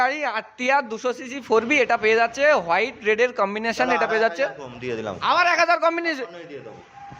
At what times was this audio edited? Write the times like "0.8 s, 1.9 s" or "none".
none